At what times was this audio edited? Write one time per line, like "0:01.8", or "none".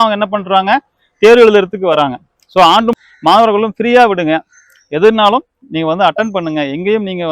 0:02.9